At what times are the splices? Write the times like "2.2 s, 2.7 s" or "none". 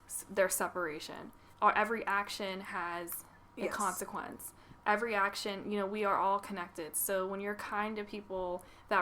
1.5 s